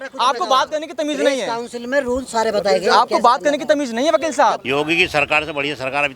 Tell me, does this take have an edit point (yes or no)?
yes